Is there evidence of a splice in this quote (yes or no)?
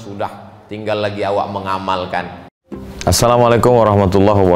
yes